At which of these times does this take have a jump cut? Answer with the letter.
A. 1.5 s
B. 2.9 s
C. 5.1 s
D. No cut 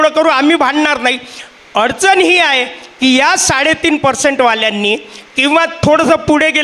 D